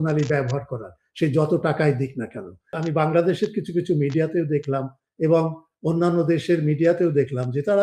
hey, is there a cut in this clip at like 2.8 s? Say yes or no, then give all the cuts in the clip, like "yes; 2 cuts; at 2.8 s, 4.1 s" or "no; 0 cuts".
yes; 1 cut; at 2.8 s